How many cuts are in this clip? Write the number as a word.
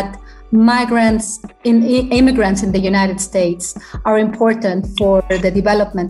zero